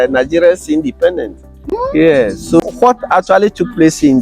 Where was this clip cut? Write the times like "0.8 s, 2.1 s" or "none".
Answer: 2.6 s